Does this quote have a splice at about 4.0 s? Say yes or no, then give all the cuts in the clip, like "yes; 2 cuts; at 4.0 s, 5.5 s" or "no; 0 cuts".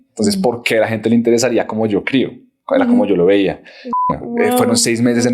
yes; 1 cut; at 4.0 s